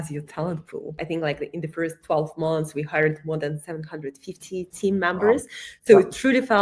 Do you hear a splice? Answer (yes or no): yes